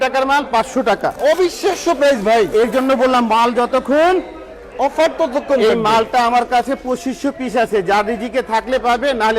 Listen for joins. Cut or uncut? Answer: uncut